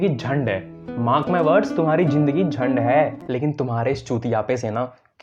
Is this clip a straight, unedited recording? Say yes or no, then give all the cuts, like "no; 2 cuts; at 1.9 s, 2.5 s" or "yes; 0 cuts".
no; 1 cut; at 3.2 s